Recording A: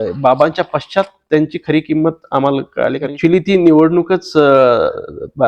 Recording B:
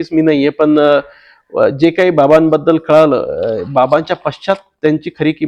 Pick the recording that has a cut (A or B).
A